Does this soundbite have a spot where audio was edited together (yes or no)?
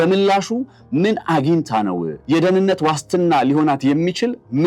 yes